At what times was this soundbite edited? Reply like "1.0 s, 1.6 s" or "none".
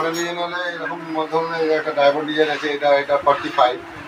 none